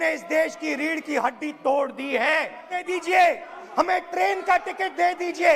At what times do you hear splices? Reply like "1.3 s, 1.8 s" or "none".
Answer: 2.8 s